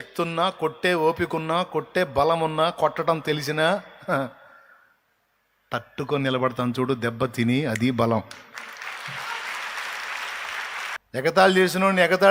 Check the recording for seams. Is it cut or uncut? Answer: uncut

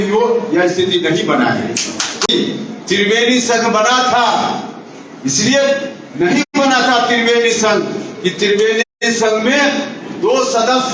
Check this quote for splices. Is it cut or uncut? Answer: cut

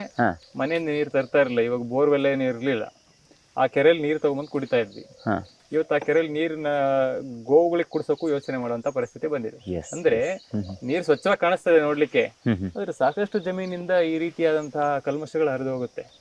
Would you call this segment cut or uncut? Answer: uncut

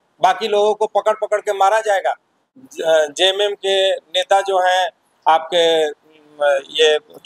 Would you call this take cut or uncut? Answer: cut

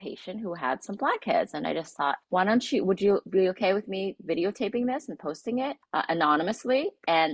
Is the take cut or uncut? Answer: cut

